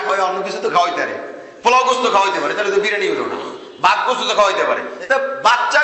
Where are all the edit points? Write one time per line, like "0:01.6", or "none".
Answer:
0:04.9